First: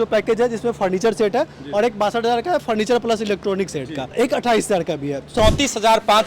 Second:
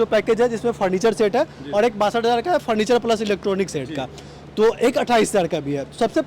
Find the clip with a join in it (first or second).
first